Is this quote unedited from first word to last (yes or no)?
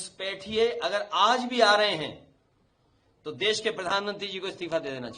yes